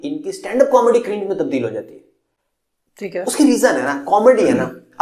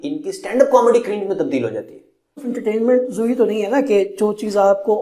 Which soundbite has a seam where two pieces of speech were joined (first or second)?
second